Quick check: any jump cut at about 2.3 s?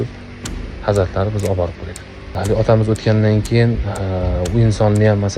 yes; 1 cut; at 2.3 s

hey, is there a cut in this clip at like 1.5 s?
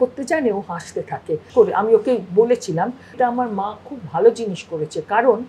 yes; 2 cuts; at 1.5 s, 3.2 s

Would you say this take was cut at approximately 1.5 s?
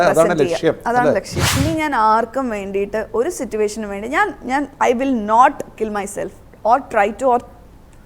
yes; 1 cut; at 1.5 s

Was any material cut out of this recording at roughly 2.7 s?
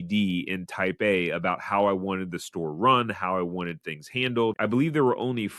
no; 1 cut; at 4.6 s

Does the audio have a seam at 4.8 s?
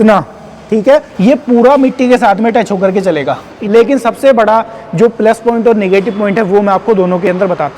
no; 2 cuts; at 1.1 s, 3.5 s

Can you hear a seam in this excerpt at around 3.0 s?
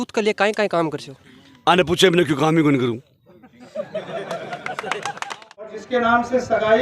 no; 1 cut; at 5.7 s

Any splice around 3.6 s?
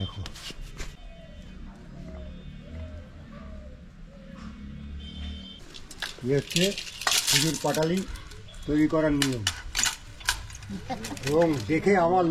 no; 2 cuts; at 0.9 s, 5.8 s

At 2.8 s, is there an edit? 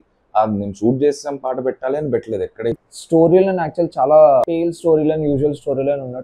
yes; 2 cuts; at 2.8 s, 4.7 s

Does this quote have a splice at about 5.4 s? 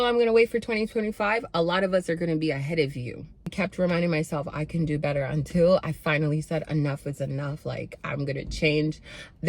no; 1 cut; at 3.5 s

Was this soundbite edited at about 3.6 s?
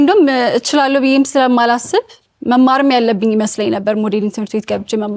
no; 0 cuts

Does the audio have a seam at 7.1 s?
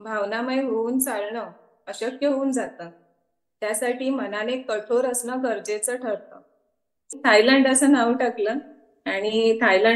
yes; 1 cut; at 7.1 s

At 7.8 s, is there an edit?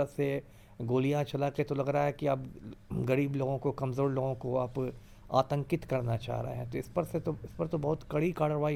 no; 0 cuts

